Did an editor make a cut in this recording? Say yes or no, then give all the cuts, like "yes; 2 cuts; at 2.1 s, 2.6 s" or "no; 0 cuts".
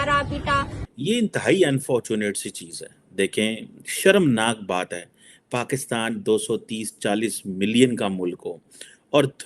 yes; 1 cut; at 0.9 s